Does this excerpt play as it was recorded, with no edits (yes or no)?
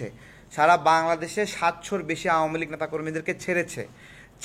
yes